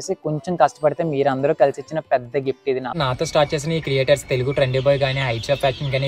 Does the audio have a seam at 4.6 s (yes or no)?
no